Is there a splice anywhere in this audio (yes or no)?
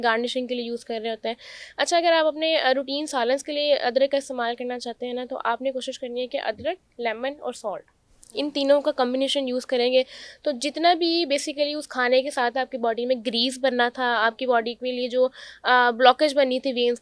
no